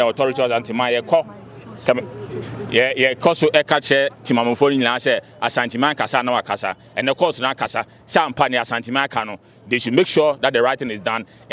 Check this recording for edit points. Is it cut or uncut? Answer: uncut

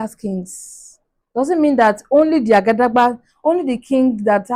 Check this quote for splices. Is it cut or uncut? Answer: uncut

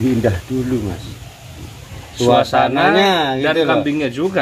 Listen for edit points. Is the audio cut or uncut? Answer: uncut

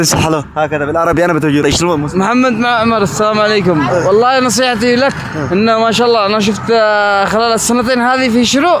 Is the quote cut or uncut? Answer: cut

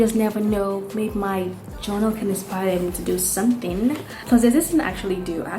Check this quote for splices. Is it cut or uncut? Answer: cut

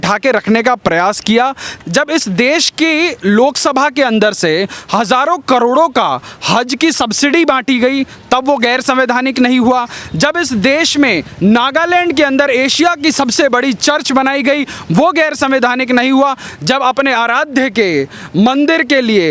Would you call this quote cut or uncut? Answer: cut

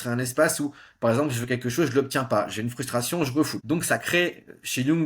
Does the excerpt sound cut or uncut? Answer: cut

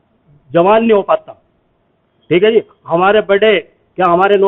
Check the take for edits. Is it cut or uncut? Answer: uncut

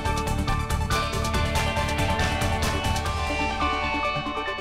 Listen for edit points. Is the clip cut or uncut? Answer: cut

